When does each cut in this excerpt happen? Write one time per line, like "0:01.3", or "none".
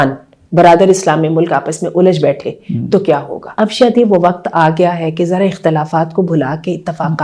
0:03.4